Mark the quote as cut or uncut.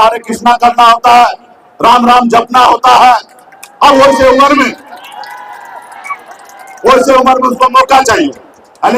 uncut